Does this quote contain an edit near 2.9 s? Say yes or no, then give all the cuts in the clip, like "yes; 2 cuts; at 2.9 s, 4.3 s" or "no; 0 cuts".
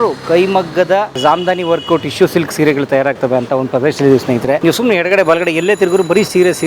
no; 2 cuts; at 1.2 s, 4.6 s